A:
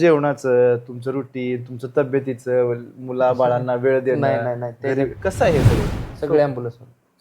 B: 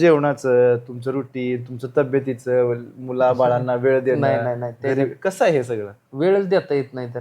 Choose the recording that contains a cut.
A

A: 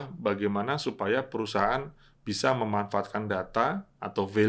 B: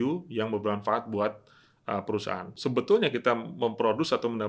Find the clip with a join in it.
B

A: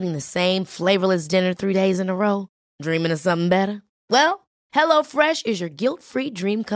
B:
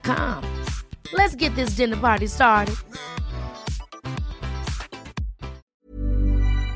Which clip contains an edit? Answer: B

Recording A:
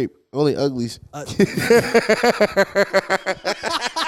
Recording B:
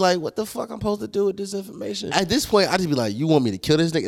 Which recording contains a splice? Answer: B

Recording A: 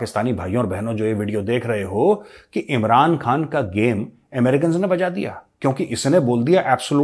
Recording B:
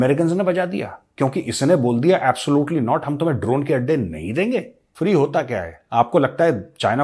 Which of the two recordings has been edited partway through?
B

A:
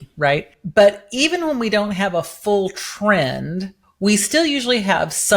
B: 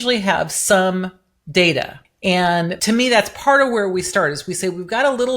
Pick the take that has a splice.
B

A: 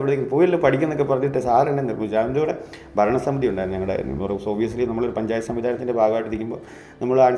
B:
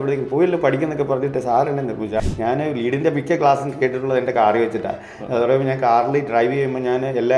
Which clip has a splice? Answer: B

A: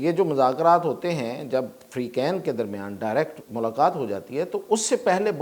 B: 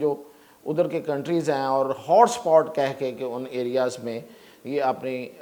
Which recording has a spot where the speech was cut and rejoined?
A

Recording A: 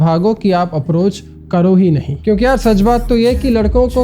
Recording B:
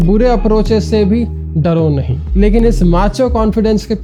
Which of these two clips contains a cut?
A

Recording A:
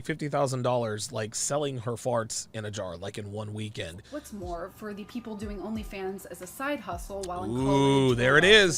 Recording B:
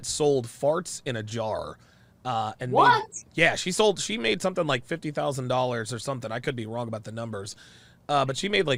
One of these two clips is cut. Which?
A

